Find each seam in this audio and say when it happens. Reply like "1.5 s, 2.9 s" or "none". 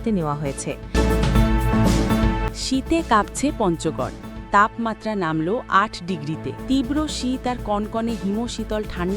0.9 s, 2.4 s, 6.6 s